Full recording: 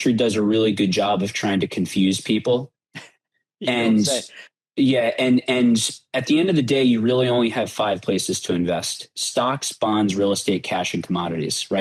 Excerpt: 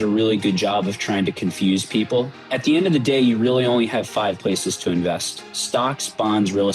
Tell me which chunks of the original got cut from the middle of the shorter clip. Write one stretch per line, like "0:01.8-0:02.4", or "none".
0:02.8-0:06.1

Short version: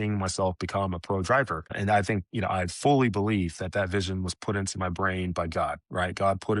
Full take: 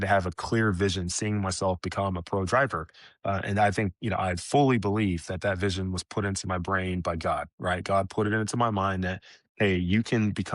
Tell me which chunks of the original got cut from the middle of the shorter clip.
0:03.0-0:03.4

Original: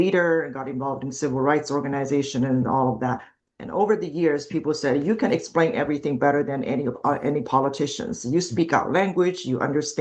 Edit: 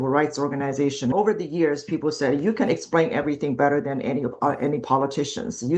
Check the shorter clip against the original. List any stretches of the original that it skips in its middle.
0:02.5-0:03.8

